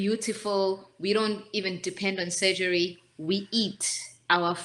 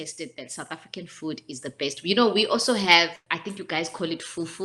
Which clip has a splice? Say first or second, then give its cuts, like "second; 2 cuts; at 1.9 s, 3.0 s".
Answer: second; 1 cut; at 3.2 s